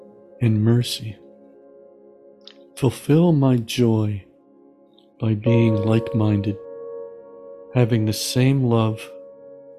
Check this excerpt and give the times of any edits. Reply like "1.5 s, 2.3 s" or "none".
none